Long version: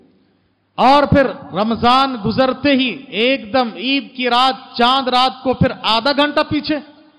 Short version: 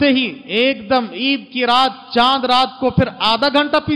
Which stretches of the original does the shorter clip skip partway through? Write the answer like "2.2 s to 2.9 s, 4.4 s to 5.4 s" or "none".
none